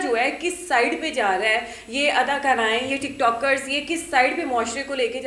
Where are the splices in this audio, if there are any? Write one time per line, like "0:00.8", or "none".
none